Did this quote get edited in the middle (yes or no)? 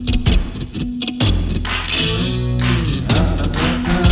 no